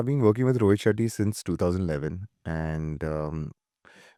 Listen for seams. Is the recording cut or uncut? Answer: uncut